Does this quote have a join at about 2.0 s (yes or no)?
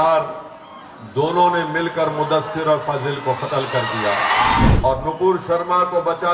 no